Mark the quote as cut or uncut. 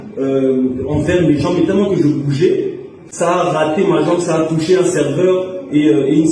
uncut